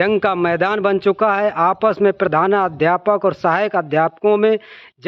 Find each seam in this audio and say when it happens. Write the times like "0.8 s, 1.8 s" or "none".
none